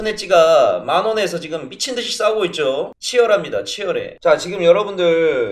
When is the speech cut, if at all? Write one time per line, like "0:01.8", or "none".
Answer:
0:04.1